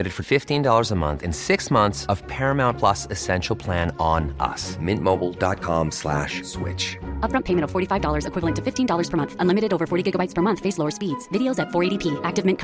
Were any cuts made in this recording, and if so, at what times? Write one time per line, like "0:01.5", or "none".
none